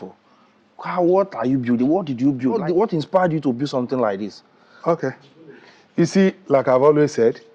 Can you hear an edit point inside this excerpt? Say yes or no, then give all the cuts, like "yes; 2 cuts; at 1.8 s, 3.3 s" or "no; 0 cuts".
yes; 1 cut; at 2.6 s